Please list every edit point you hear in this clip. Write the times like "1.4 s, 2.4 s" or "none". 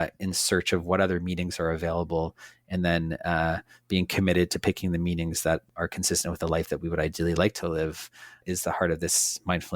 5.6 s, 8.4 s